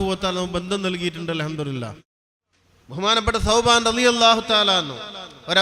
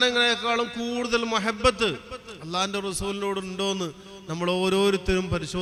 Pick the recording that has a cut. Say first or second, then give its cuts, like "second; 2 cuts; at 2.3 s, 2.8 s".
first; 1 cut; at 2.1 s